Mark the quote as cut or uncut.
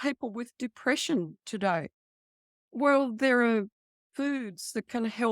uncut